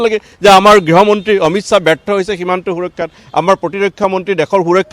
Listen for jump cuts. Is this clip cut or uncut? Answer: uncut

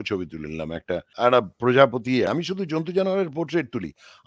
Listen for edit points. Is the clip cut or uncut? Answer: cut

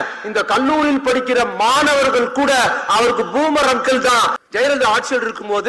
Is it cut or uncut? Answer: cut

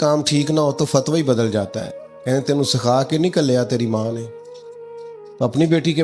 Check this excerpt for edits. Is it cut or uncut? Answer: uncut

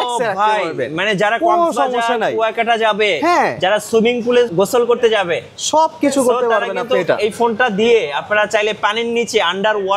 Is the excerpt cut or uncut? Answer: cut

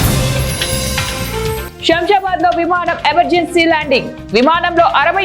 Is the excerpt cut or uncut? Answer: cut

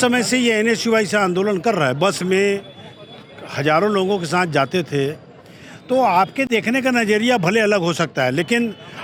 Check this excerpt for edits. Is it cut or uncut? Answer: uncut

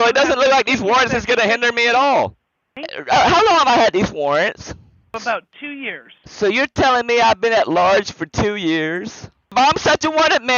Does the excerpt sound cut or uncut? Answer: cut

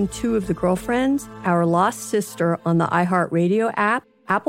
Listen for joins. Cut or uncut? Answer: uncut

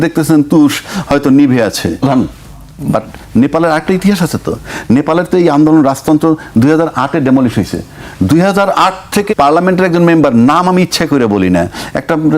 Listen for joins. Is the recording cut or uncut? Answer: cut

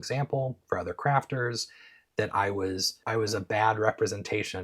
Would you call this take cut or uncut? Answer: cut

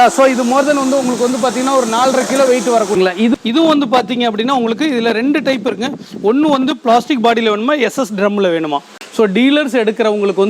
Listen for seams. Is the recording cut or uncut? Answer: cut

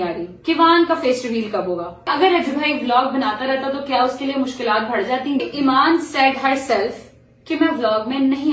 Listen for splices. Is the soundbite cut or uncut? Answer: cut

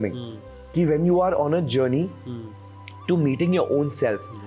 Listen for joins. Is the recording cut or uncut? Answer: uncut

